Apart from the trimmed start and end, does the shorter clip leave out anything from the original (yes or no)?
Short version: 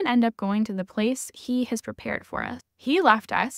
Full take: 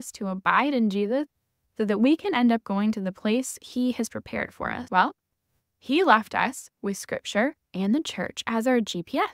yes